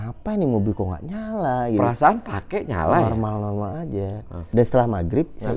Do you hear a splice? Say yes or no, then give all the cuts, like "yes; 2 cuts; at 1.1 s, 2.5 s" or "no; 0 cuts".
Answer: yes; 1 cut; at 4.4 s